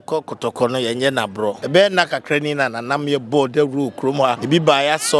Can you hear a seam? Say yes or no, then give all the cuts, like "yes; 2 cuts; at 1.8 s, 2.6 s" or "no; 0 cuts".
yes; 2 cuts; at 1.6 s, 4.4 s